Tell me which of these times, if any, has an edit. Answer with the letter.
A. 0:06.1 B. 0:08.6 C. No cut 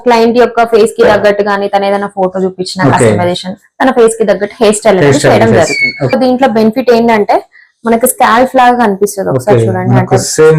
A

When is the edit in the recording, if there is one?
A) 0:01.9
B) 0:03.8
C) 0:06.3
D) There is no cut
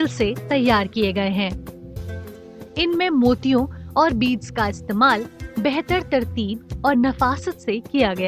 A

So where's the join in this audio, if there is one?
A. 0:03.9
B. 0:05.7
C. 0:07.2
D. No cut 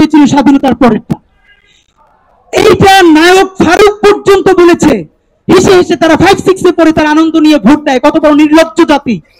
D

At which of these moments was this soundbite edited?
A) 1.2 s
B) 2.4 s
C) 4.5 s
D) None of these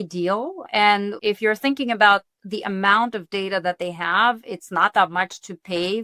B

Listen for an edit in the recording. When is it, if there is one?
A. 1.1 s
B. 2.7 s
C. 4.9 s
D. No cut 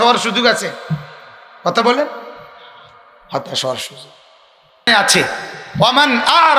C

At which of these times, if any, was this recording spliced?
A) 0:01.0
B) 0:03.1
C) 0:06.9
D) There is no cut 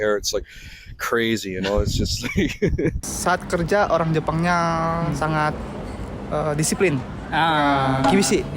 B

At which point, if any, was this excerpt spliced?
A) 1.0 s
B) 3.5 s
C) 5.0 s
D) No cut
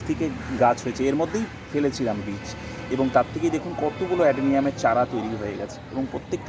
D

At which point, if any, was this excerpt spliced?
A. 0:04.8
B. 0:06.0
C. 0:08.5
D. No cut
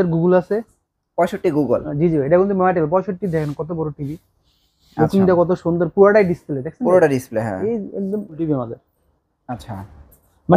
C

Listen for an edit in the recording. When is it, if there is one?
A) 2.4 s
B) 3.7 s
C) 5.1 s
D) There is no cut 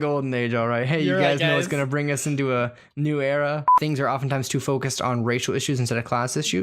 B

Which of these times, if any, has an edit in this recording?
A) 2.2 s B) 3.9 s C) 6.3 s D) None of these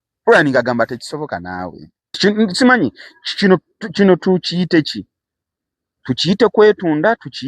A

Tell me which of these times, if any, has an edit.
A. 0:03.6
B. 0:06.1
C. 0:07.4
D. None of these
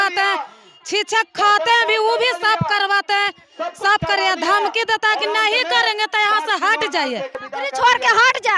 C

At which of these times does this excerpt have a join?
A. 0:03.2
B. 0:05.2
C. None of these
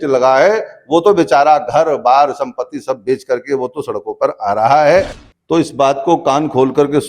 B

